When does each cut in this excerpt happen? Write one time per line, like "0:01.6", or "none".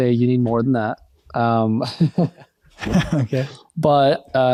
none